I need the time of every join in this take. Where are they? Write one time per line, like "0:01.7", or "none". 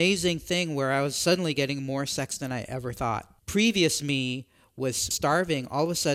0:03.3
0:05.1